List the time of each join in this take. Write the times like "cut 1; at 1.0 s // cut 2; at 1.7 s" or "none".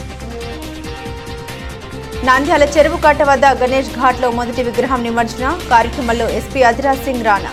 none